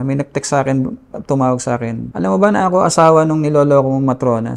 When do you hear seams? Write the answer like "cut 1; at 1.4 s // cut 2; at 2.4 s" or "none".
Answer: cut 1; at 2.0 s

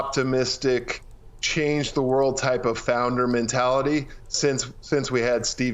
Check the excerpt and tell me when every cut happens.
none

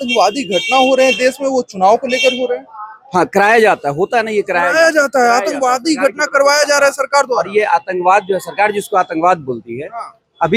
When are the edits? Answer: none

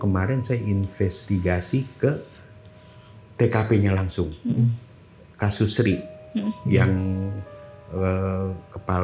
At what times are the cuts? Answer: none

